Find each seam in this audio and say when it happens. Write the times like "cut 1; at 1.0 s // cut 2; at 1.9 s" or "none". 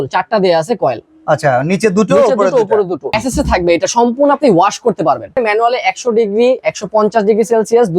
cut 1; at 3.1 s // cut 2; at 5.3 s